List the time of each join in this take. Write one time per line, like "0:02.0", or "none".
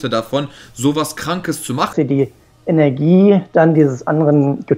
0:01.9